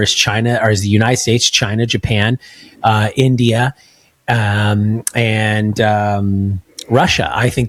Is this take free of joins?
yes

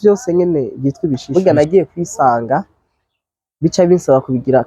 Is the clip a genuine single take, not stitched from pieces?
no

